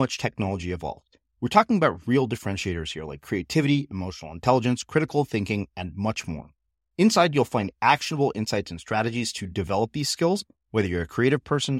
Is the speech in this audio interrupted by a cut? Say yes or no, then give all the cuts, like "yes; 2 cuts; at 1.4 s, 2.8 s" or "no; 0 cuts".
no; 0 cuts